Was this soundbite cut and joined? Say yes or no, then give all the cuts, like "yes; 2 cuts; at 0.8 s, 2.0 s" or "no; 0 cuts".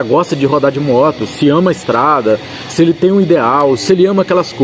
no; 0 cuts